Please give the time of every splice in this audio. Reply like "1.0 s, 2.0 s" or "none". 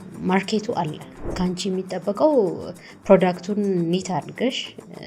1.2 s